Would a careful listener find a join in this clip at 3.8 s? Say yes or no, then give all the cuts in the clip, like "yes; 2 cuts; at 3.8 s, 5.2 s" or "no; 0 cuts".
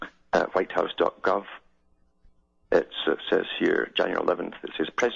yes; 1 cut; at 3.8 s